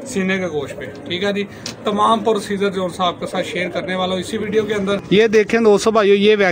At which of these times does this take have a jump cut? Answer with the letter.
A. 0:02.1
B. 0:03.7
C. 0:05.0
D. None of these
C